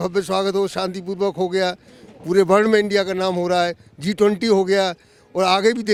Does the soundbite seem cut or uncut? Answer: uncut